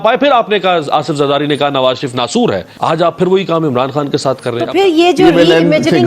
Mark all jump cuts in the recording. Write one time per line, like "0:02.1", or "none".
0:02.7
0:04.7